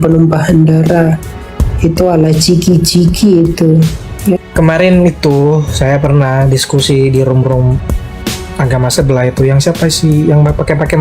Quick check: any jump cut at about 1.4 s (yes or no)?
no